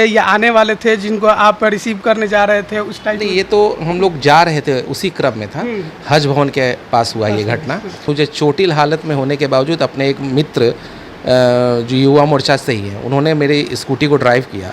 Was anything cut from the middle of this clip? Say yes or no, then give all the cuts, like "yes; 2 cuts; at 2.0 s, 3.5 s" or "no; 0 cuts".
yes; 1 cut; at 8.0 s